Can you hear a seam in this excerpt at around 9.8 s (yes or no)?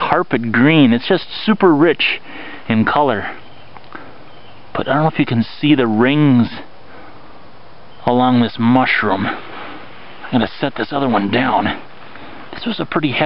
no